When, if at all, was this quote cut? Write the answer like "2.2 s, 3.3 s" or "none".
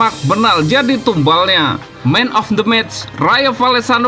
1.9 s